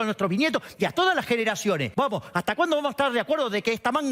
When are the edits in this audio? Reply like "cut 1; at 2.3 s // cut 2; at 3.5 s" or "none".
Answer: cut 1; at 1.9 s